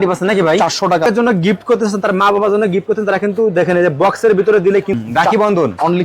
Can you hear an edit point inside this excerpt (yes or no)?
yes